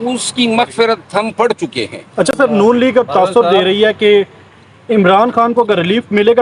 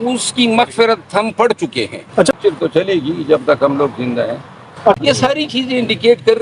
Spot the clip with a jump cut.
second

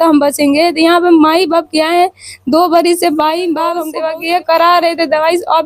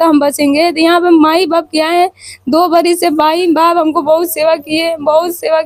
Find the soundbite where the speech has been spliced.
first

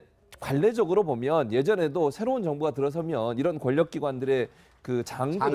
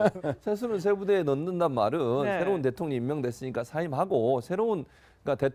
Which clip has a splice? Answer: first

